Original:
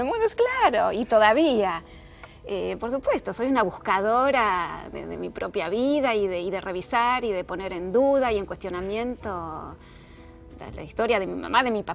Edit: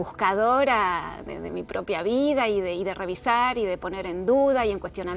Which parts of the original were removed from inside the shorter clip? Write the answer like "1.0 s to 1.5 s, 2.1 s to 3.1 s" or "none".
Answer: none